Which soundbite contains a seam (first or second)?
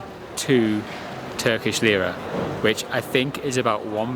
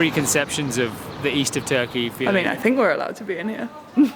second